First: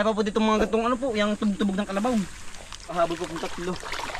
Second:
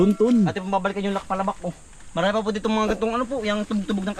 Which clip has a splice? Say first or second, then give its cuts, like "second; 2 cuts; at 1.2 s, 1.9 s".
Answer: first; 1 cut; at 2.9 s